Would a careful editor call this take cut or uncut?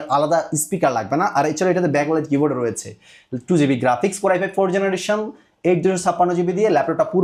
uncut